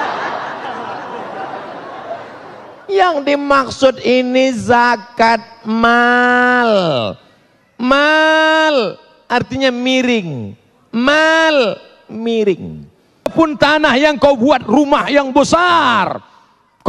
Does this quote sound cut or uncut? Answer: cut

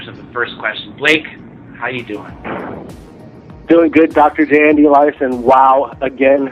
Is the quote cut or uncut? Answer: uncut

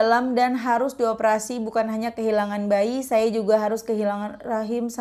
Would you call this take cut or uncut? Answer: uncut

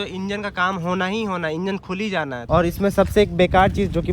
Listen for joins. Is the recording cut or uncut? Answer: cut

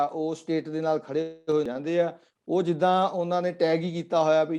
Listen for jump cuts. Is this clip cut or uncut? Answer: cut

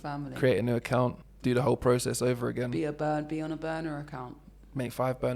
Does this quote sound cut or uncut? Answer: cut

